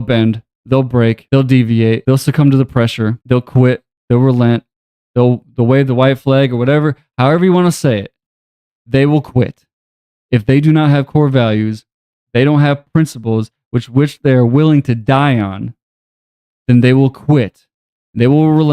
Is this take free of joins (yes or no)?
no